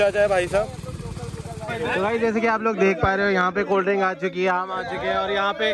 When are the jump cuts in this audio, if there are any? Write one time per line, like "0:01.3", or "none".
0:01.7

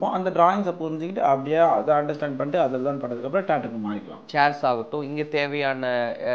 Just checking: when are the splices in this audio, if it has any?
0:04.3

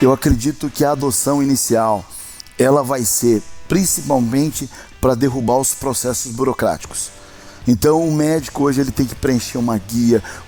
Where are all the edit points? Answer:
none

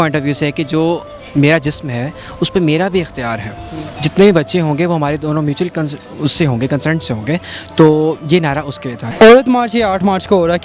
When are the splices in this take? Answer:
0:09.0

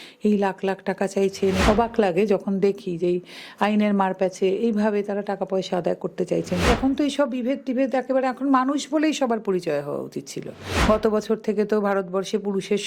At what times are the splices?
0:01.6
0:06.6
0:10.7

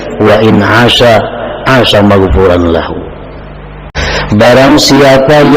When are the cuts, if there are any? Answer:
0:03.9

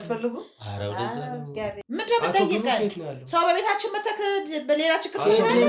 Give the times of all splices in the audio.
0:01.8

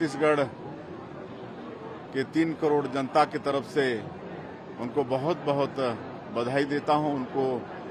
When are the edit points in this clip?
none

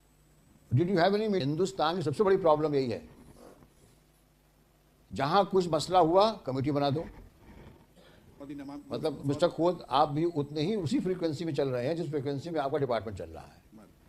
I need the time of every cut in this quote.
0:01.4
0:08.3

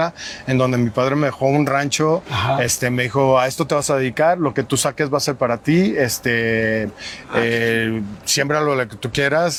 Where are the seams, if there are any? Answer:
none

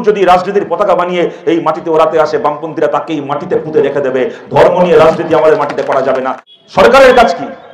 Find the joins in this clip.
0:06.4

